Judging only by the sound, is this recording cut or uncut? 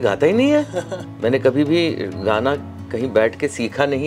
cut